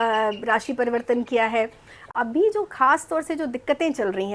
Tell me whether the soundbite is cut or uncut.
cut